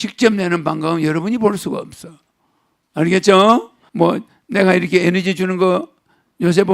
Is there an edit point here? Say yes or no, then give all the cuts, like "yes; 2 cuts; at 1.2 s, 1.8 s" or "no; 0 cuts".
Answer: yes; 1 cut; at 3.8 s